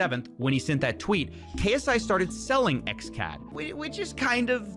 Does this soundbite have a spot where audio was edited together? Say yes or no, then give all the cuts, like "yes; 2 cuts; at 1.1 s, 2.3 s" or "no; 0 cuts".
yes; 1 cut; at 3.5 s